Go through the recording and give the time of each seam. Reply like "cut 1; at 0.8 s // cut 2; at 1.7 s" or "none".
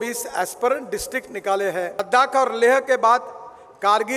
cut 1; at 2.0 s